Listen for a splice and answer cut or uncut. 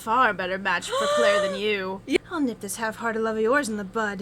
cut